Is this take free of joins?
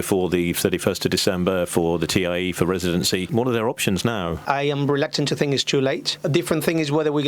no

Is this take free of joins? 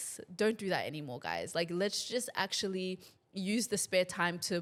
yes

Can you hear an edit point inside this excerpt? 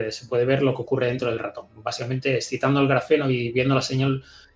no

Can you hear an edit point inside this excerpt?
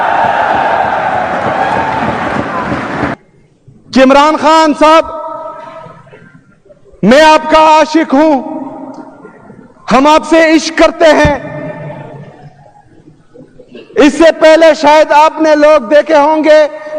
yes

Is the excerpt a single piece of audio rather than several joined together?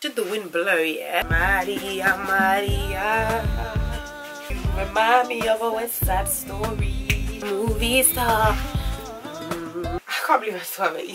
no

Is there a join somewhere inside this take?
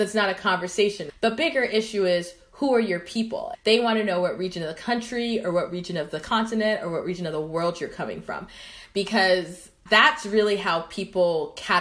yes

